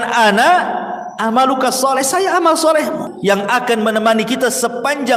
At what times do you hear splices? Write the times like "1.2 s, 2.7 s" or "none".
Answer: 3.1 s